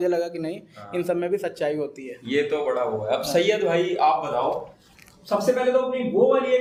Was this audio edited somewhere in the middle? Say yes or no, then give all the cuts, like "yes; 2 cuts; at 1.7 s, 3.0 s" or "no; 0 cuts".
no; 0 cuts